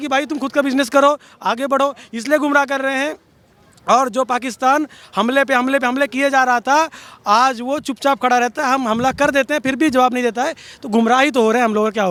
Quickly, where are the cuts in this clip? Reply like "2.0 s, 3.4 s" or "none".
none